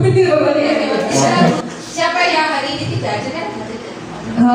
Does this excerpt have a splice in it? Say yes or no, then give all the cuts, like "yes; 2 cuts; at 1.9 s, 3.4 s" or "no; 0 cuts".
yes; 1 cut; at 1.1 s